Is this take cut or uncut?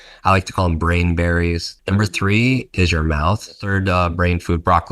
cut